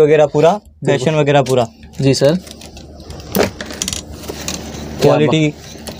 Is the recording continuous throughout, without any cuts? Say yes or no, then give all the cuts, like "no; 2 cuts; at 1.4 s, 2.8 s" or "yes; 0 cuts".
yes; 0 cuts